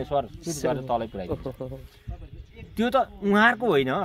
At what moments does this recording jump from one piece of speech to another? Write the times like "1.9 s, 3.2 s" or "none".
none